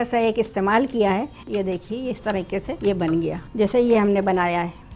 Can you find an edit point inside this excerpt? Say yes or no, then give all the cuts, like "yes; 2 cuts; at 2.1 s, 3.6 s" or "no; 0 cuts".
yes; 3 cuts; at 1.4 s, 2.7 s, 3.4 s